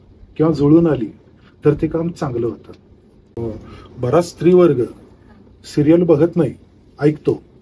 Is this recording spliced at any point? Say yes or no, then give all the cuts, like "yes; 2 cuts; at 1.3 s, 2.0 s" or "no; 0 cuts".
yes; 1 cut; at 3.3 s